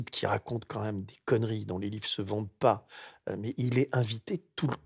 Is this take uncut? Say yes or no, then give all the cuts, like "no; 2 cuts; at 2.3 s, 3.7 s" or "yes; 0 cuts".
yes; 0 cuts